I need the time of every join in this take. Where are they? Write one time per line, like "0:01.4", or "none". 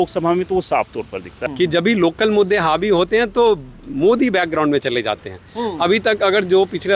0:01.4